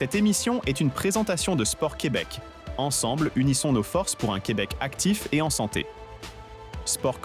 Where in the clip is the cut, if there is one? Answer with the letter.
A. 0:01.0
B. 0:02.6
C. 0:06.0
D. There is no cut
D